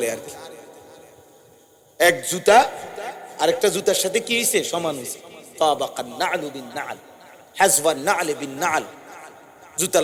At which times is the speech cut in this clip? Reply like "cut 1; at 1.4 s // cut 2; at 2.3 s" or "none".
none